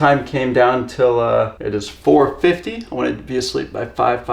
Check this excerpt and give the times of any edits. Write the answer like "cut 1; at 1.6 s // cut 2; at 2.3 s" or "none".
cut 1; at 1.6 s